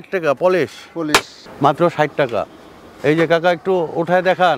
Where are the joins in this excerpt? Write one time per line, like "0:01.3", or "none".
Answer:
0:01.4